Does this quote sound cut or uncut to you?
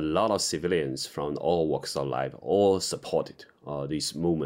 uncut